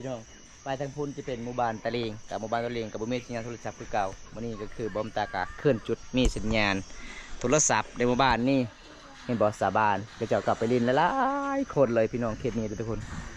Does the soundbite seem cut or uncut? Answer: uncut